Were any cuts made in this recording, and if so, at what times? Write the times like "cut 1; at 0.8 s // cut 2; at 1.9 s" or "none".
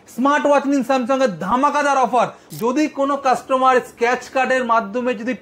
cut 1; at 2.4 s